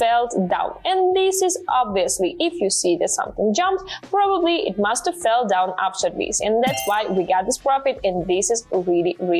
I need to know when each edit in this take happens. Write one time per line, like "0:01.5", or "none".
none